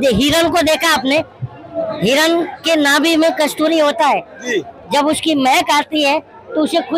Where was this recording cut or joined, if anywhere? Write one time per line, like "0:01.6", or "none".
none